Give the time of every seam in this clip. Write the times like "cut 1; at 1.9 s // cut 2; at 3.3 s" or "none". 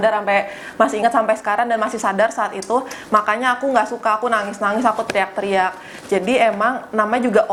none